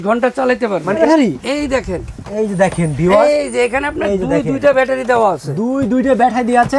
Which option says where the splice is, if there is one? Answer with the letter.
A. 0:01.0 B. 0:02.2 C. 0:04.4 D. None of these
A